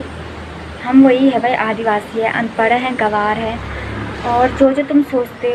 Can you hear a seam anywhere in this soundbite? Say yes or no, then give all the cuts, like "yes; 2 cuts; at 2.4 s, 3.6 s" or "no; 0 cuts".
no; 0 cuts